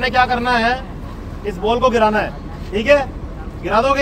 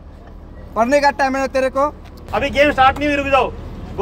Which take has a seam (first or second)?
second